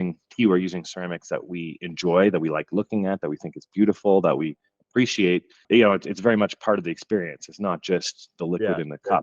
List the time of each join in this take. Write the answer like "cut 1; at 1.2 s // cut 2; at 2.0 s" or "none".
cut 1; at 5.6 s